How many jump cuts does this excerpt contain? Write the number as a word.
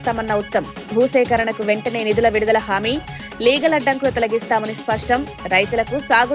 zero